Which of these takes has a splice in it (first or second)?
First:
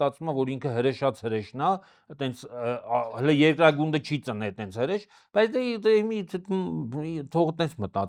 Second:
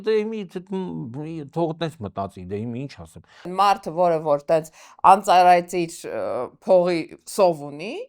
second